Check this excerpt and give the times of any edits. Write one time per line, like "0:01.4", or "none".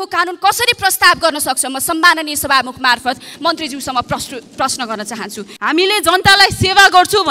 0:05.5